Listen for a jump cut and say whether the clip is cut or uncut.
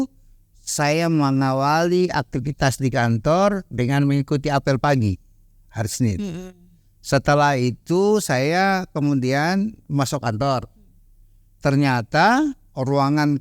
uncut